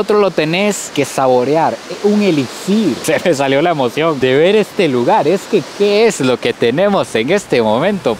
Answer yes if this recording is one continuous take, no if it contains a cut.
yes